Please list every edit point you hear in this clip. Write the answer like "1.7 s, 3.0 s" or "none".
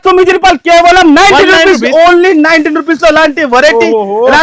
none

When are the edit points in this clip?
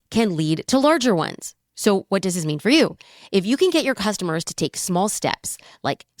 none

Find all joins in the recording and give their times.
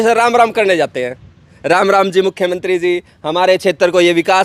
none

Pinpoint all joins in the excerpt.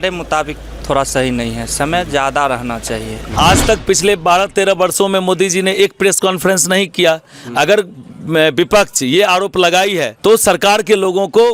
3.2 s, 10.1 s

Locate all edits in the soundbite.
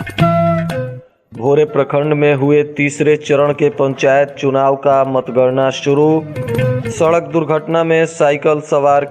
0.9 s

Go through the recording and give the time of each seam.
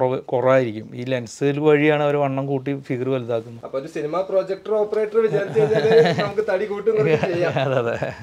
none

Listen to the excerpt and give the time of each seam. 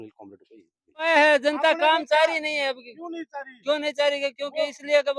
1.1 s

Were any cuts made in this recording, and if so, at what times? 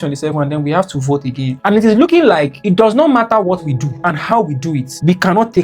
1.5 s

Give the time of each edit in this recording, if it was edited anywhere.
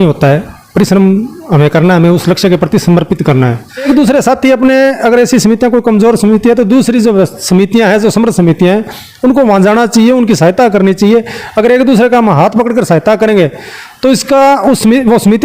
3.9 s

